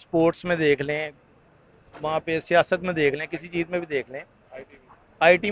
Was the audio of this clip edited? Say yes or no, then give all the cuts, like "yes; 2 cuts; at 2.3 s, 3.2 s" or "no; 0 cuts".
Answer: no; 0 cuts